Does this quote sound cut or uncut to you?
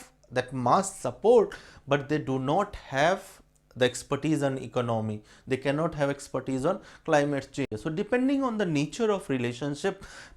cut